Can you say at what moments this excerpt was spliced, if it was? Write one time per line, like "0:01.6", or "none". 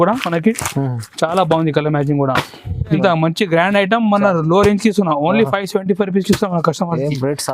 0:03.0